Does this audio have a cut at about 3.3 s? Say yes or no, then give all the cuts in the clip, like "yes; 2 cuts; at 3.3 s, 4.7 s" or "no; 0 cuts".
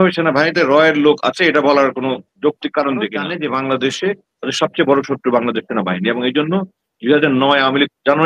yes; 1 cut; at 3.3 s